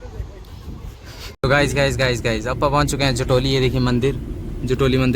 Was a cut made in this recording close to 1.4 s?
yes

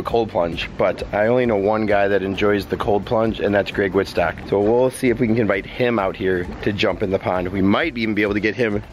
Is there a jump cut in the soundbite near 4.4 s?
no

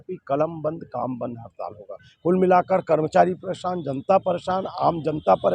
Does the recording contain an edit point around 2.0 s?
yes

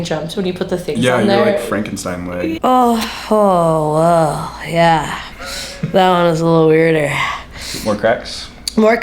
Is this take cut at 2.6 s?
yes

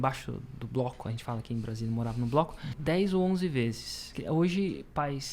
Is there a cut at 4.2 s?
yes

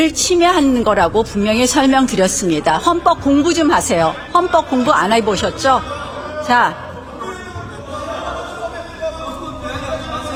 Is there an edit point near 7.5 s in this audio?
no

